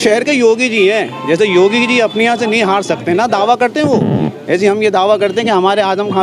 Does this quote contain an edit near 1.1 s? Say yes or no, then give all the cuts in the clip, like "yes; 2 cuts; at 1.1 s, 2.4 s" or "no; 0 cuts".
no; 0 cuts